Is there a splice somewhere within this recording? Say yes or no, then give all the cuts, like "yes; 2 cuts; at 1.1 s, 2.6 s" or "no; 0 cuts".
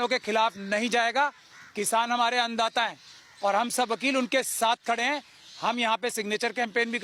no; 0 cuts